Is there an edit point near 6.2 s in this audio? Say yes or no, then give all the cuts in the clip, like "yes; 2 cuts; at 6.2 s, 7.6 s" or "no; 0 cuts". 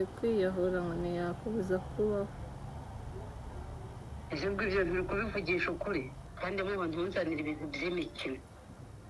yes; 1 cut; at 6.2 s